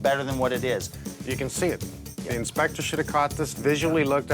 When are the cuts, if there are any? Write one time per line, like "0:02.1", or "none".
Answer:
0:00.9